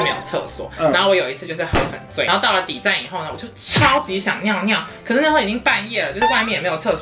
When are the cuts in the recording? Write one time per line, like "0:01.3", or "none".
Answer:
0:02.3